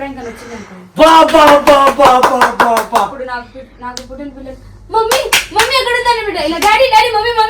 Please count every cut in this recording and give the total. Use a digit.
0